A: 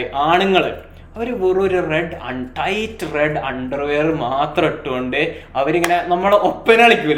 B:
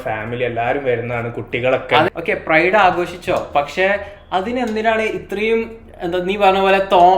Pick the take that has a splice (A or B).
B